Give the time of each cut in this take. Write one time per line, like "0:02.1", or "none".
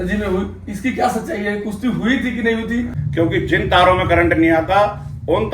0:03.0